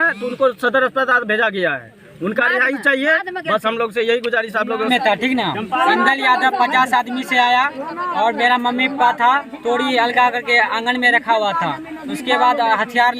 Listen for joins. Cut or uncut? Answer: cut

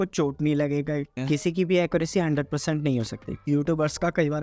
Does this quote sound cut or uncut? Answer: cut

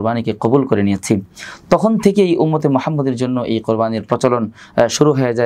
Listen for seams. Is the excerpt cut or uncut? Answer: uncut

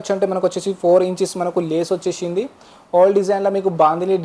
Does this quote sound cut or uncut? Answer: uncut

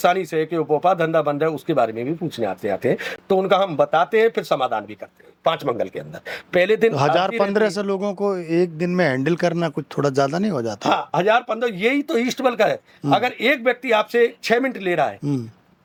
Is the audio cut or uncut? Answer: uncut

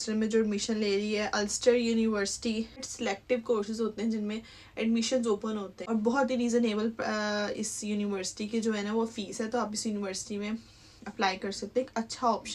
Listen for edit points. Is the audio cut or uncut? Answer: cut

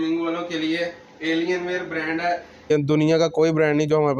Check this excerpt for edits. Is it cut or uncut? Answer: cut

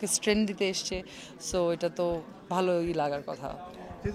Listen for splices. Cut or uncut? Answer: uncut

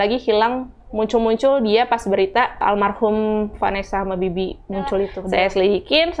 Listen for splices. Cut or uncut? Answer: cut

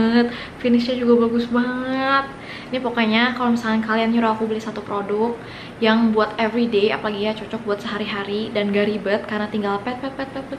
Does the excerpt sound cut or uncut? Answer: uncut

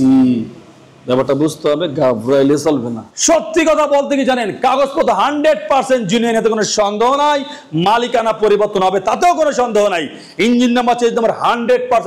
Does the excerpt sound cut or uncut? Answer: cut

